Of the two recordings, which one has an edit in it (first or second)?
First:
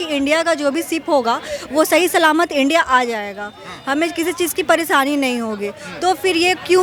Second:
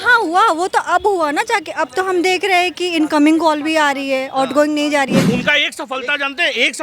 second